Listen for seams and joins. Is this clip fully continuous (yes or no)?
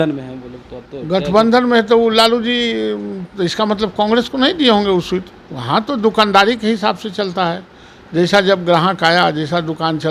yes